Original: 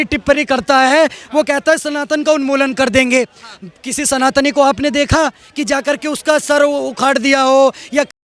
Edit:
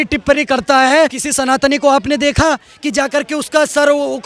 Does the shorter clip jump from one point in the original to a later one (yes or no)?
yes